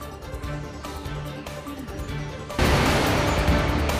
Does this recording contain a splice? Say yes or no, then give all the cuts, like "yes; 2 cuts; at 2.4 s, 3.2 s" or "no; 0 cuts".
no; 0 cuts